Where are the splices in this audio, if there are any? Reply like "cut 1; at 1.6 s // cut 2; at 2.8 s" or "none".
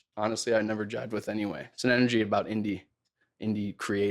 cut 1; at 1.7 s